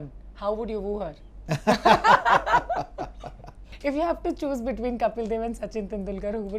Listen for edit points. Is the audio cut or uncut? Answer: cut